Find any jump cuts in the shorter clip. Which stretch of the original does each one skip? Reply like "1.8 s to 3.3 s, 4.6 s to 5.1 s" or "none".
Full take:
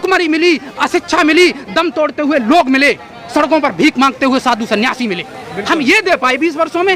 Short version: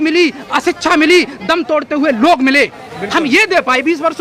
3.1 s to 5.4 s